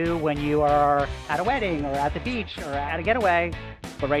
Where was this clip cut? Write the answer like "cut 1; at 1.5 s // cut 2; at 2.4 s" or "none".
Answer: cut 1; at 2.7 s